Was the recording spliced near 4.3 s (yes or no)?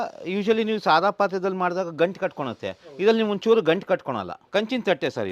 yes